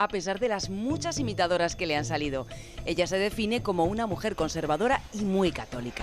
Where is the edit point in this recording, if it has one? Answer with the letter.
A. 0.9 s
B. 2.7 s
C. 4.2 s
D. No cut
D